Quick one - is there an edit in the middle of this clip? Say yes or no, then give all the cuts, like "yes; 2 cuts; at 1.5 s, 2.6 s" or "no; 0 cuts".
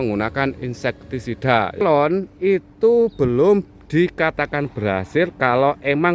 yes; 1 cut; at 1.8 s